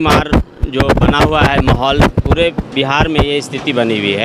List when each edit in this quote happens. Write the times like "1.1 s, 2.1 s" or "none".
none